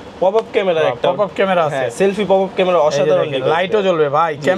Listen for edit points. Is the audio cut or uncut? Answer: uncut